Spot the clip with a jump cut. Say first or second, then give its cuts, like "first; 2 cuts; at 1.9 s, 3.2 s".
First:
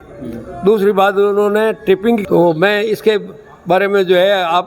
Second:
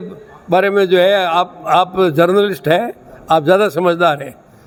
first; 1 cut; at 2.2 s